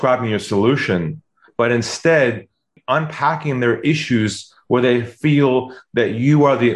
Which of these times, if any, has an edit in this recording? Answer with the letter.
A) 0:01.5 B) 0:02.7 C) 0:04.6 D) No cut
B